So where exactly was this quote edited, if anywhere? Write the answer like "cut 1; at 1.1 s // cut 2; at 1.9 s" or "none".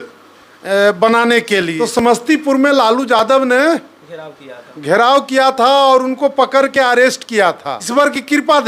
cut 1; at 1.7 s // cut 2; at 7.7 s